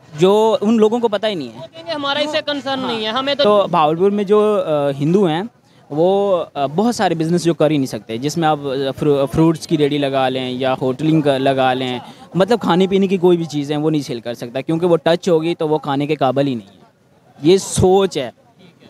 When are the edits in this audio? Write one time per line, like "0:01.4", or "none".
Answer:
0:03.4